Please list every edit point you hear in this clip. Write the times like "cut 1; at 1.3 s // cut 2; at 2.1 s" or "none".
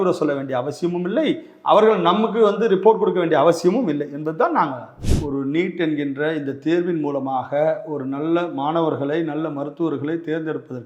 cut 1; at 5.0 s